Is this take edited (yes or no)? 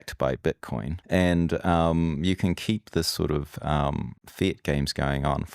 yes